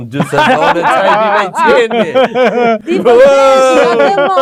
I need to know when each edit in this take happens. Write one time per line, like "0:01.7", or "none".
none